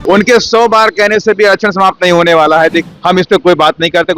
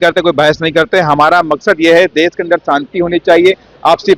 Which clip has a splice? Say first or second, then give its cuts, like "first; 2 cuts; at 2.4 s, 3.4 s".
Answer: first; 1 cut; at 2.9 s